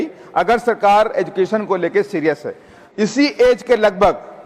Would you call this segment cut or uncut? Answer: cut